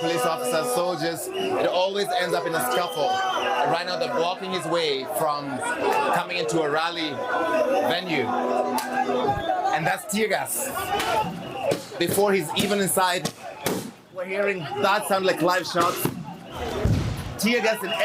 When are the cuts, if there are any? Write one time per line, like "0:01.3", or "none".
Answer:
none